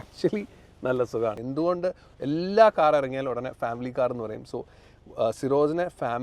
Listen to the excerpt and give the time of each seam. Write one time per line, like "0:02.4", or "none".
0:01.4